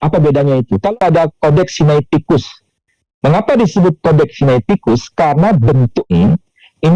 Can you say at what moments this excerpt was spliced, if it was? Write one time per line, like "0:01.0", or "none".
0:01.0
0:06.1